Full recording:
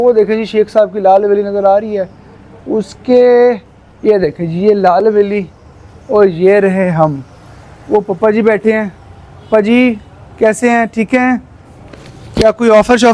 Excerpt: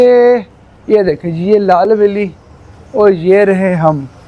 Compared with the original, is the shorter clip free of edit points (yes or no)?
yes